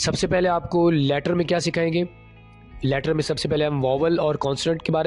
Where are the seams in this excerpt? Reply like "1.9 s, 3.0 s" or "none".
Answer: none